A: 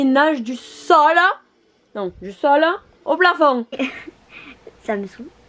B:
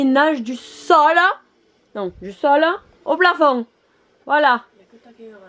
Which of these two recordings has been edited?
A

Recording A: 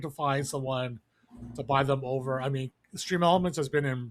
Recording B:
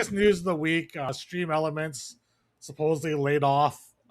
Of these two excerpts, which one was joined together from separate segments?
B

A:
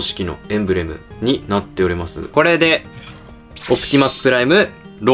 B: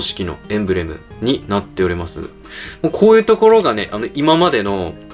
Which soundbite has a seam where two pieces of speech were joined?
A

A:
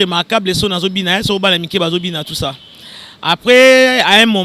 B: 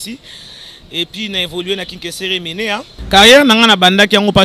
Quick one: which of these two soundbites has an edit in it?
B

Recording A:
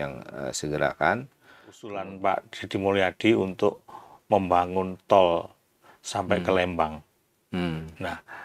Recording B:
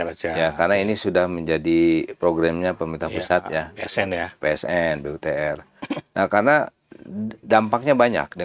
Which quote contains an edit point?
A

